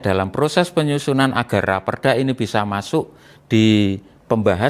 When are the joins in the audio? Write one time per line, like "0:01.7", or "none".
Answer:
none